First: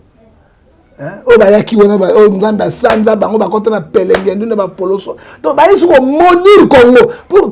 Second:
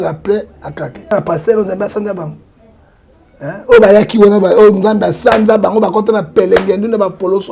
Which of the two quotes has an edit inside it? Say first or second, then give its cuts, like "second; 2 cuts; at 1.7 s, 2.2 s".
second; 1 cut; at 1.1 s